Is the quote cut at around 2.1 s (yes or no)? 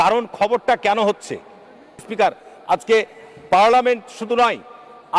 yes